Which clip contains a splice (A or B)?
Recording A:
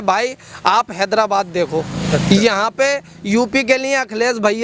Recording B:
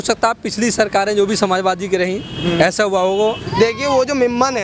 B